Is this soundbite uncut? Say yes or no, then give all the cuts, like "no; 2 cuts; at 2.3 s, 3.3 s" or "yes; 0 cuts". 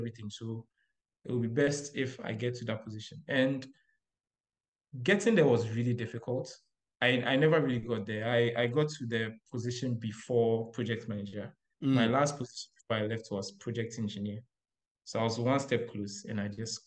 yes; 0 cuts